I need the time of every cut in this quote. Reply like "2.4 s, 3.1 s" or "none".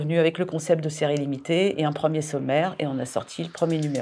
none